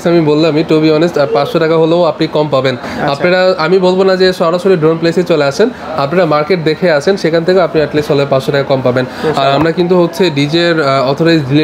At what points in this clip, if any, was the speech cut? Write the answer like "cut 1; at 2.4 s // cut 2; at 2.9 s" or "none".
none